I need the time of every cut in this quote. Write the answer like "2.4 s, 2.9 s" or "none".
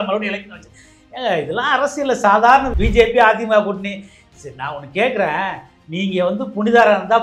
2.7 s